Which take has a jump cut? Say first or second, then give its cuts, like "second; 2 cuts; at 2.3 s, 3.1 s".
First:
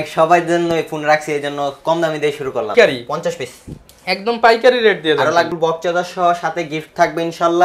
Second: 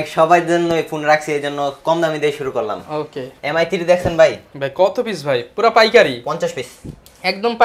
first; 2 cuts; at 2.7 s, 5.5 s